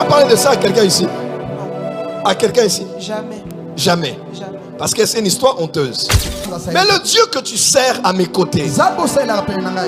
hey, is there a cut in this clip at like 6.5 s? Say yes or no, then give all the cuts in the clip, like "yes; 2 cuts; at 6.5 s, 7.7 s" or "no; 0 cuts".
yes; 1 cut; at 6.5 s